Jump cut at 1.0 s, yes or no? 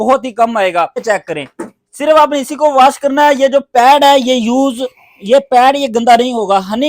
yes